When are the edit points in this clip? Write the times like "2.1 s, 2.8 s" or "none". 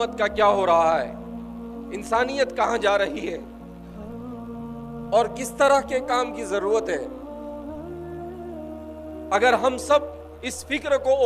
3.4 s, 4.8 s, 7.1 s, 9.3 s